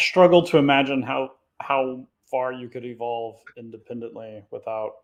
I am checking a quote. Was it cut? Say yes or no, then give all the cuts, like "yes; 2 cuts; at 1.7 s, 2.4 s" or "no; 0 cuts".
no; 0 cuts